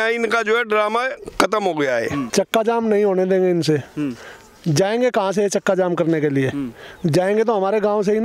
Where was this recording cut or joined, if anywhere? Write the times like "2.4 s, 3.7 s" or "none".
2.3 s